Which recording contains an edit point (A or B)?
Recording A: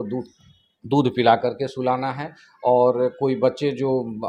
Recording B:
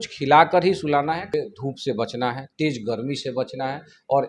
B